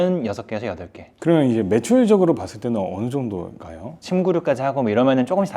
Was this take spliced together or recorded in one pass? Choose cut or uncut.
uncut